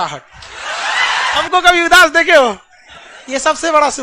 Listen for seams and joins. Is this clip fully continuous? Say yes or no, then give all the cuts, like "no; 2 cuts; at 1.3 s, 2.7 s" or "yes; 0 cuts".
no; 1 cut; at 1.4 s